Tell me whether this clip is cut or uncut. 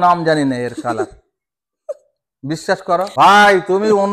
cut